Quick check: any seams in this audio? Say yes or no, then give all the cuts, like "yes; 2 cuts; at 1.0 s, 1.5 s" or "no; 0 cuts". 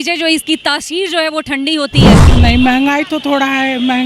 yes; 1 cut; at 2.2 s